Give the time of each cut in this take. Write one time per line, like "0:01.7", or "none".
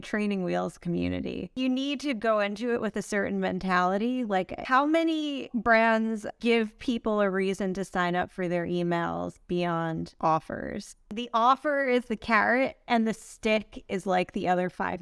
0:01.5
0:04.6
0:06.3
0:10.1
0:11.2